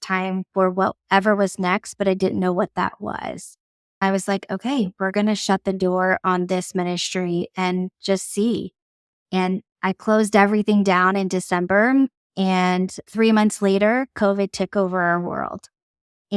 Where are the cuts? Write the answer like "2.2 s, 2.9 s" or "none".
4.0 s